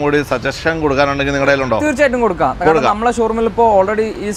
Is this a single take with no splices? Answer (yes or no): yes